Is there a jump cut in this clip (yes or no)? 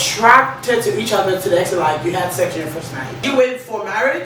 yes